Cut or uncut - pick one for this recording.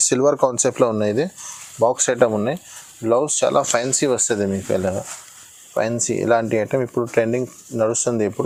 uncut